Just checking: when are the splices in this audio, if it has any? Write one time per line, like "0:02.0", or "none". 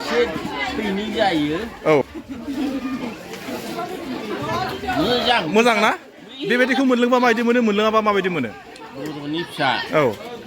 0:02.0